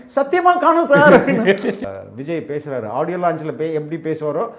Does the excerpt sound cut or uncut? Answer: cut